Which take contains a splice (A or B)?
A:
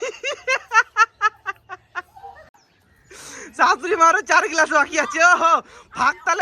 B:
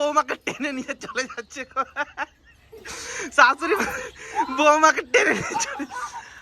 A